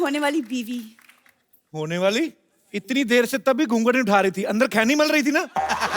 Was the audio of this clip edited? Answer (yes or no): no